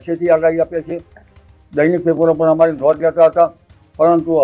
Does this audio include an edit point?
no; 0 cuts

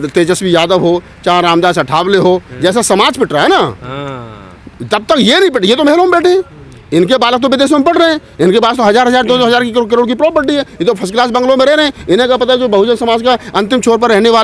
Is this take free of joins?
yes; 0 cuts

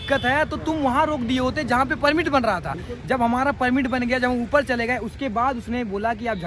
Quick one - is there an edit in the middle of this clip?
no; 0 cuts

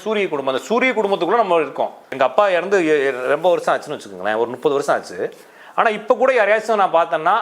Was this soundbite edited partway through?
yes; 1 cut; at 2.1 s

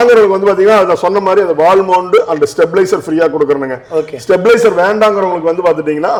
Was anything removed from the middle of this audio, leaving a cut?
no; 0 cuts

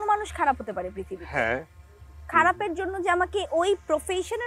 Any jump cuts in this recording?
no; 0 cuts

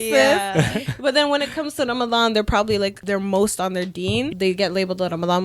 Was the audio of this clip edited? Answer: yes; 2 cuts; at 3.0 s, 4.3 s

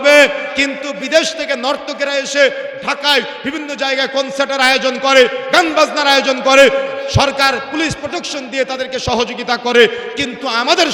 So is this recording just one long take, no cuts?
yes; 0 cuts

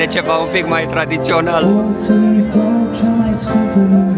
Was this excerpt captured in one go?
yes; 0 cuts

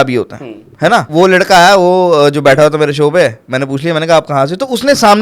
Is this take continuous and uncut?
no; 1 cut; at 1.1 s

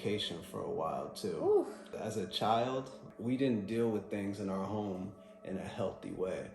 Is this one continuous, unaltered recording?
no; 2 cuts; at 1.9 s, 3.0 s

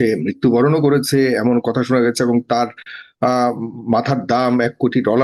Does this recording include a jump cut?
no; 0 cuts

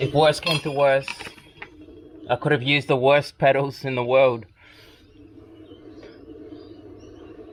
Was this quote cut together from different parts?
no; 0 cuts

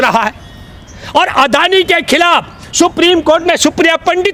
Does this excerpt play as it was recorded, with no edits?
yes; 0 cuts

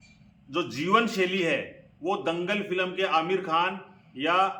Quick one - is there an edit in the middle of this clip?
no; 0 cuts

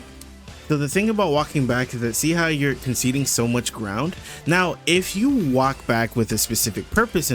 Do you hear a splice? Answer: no; 0 cuts

